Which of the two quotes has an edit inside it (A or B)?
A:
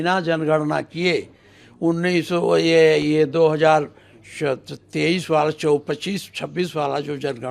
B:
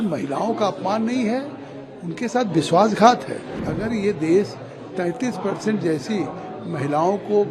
B